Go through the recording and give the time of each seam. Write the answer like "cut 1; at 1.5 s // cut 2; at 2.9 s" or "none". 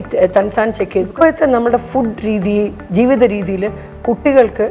cut 1; at 1.1 s